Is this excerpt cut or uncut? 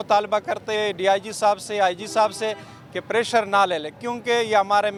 uncut